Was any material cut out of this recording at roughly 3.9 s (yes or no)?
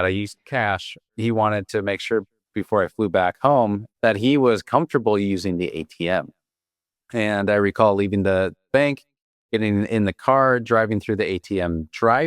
yes